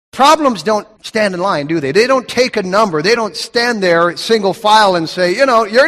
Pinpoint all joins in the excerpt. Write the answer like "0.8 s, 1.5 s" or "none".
1.0 s, 3.2 s